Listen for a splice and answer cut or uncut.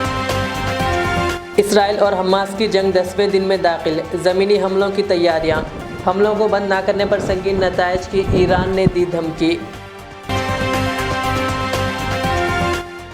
uncut